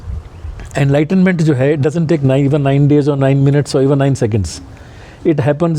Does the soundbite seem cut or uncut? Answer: uncut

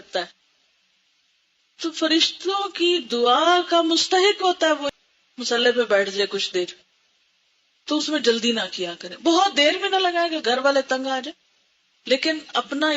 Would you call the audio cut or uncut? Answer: cut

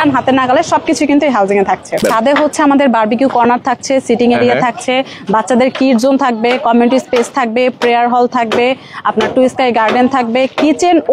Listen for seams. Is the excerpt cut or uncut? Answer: cut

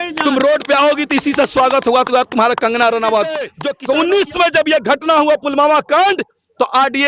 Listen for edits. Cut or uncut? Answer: cut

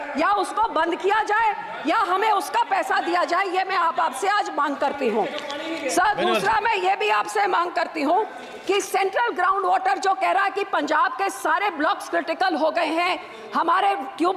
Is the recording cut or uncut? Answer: uncut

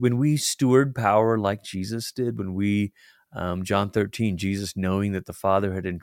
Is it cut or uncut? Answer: uncut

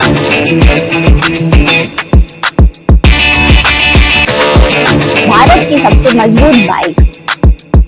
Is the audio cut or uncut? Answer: uncut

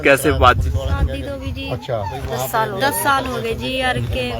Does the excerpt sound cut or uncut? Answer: uncut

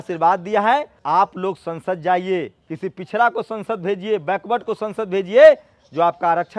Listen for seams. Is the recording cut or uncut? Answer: cut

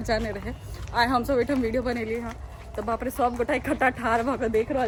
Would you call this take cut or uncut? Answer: uncut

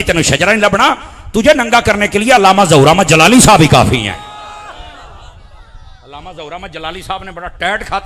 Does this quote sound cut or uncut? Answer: uncut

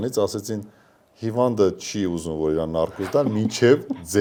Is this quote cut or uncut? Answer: uncut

